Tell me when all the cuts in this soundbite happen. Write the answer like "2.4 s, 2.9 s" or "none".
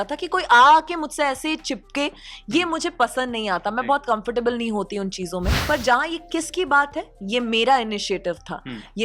5.6 s